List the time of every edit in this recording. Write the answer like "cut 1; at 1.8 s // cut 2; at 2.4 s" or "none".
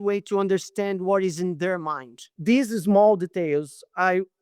cut 1; at 2.3 s